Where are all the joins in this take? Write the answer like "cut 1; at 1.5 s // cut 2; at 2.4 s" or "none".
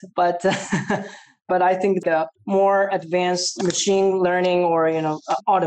cut 1; at 2.0 s